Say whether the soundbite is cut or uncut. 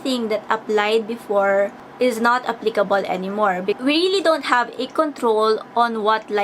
cut